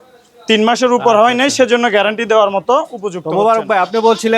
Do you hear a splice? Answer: yes; 1 cut; at 3.2 s

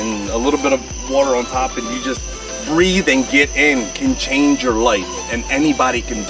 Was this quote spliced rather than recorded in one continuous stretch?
no; 0 cuts

